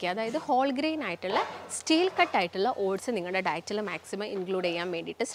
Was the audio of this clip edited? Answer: no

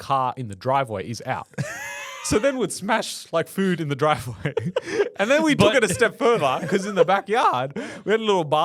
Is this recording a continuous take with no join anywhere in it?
yes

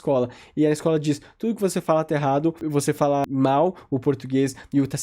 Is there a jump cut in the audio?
yes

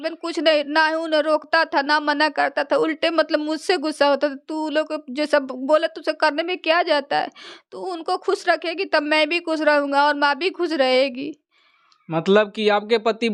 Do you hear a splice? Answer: no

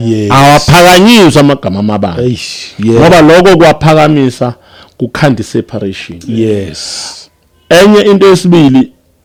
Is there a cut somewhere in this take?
no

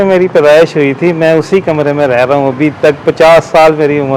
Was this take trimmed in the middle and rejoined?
no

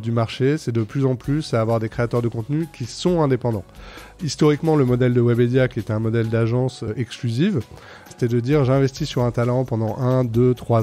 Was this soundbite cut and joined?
yes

